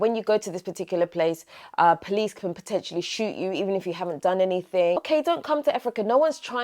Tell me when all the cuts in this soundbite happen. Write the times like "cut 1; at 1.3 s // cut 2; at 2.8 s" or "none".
cut 1; at 5.0 s